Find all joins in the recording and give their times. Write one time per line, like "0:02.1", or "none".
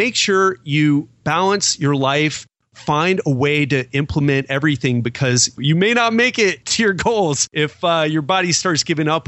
0:01.2
0:02.6
0:07.4